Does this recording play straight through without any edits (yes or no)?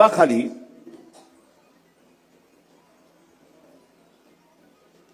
yes